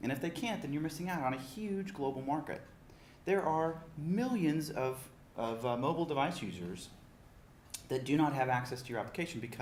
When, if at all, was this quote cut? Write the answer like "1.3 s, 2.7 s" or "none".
none